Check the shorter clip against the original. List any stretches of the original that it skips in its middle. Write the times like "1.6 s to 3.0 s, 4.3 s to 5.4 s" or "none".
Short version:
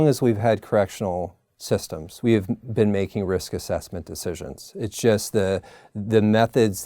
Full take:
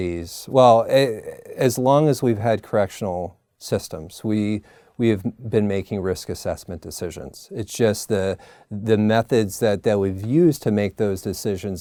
4.0 s to 4.8 s